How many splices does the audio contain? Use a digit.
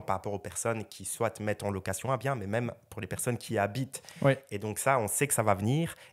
0